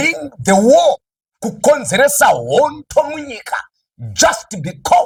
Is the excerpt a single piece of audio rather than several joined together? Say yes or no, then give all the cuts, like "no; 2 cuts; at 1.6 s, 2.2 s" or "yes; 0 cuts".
yes; 0 cuts